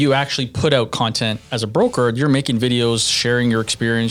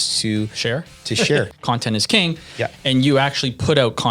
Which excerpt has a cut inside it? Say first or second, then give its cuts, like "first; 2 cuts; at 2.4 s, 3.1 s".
second; 1 cut; at 1.5 s